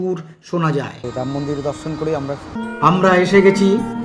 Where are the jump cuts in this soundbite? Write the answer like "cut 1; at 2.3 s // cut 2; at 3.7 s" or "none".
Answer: cut 1; at 1.0 s // cut 2; at 2.6 s